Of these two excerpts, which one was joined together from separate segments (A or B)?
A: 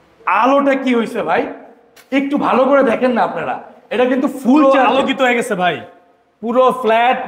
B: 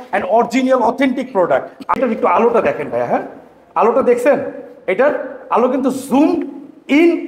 B